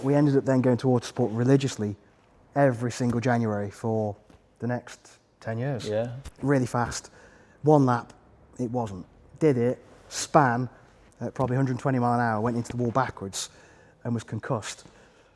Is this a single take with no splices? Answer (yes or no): no